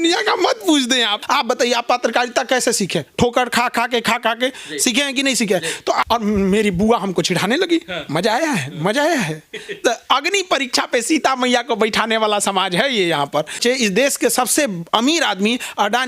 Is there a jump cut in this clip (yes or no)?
yes